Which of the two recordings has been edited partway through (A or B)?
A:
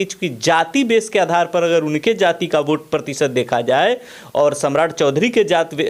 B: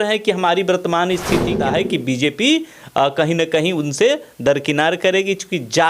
B